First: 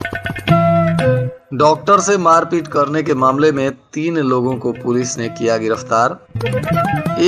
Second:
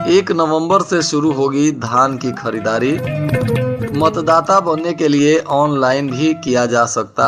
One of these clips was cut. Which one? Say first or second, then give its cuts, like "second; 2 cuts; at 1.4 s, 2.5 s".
first; 1 cut; at 1.4 s